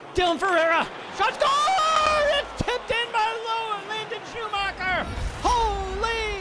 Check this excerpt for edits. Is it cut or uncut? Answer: uncut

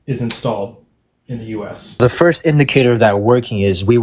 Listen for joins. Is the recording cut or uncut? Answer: cut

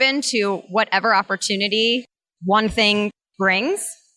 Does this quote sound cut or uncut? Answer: uncut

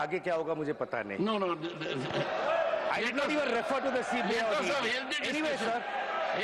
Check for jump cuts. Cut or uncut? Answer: uncut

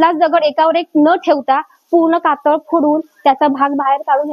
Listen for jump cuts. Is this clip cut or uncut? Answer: uncut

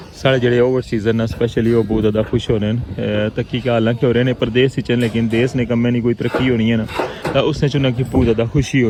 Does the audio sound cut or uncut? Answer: uncut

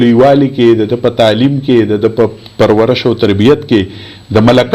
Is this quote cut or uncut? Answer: uncut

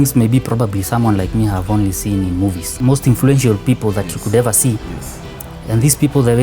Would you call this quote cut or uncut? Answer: cut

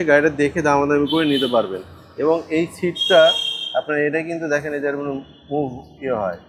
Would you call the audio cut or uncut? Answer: uncut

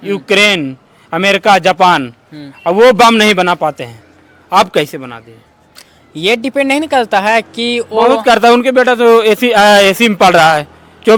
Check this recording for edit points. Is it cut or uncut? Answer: uncut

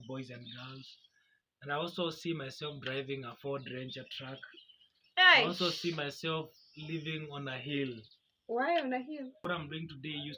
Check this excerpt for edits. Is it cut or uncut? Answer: cut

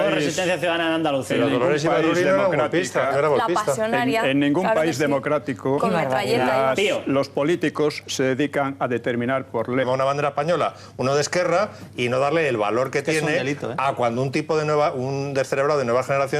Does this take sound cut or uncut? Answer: uncut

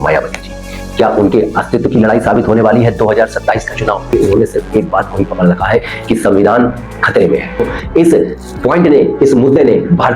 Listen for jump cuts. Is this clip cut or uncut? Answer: cut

